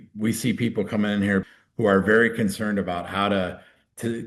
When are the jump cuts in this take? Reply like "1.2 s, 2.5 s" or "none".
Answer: 1.4 s